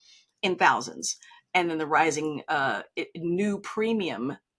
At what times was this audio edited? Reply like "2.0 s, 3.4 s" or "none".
none